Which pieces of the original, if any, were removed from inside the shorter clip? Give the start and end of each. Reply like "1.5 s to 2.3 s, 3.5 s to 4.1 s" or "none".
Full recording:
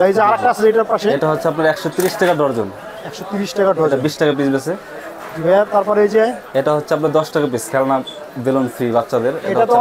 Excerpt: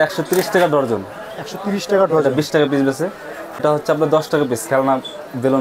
5.3 s to 6.6 s